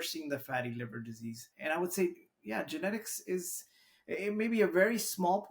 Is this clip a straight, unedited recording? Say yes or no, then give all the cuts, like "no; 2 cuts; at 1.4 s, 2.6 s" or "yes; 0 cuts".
no; 1 cut; at 1.5 s